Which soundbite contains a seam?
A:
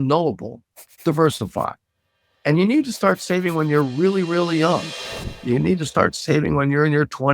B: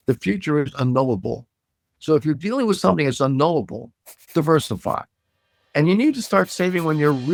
A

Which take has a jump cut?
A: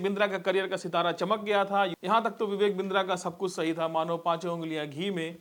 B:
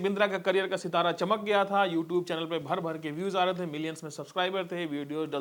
A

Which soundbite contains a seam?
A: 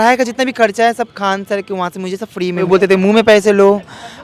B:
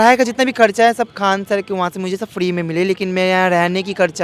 A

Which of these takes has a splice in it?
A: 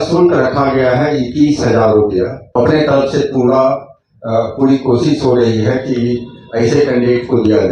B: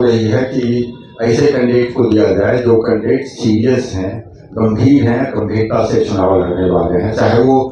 A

